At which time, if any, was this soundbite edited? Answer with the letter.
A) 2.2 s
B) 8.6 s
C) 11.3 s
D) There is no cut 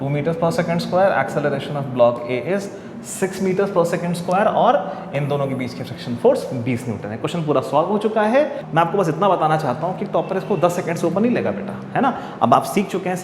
B